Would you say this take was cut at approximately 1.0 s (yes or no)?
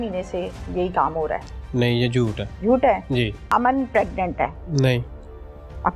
no